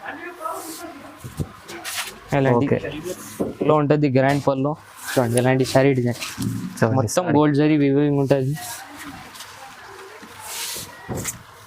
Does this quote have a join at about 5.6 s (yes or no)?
no